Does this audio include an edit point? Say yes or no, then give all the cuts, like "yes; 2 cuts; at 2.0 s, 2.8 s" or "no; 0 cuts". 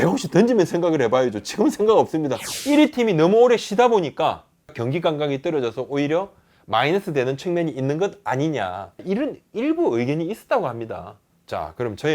yes; 2 cuts; at 2.5 s, 9.0 s